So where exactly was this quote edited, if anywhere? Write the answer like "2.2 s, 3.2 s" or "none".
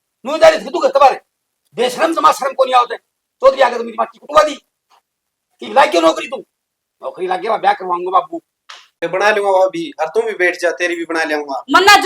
8.9 s